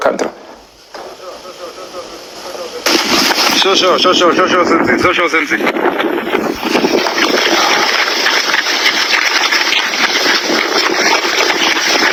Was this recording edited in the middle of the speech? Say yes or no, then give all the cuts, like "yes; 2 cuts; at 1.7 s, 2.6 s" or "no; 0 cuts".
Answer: no; 0 cuts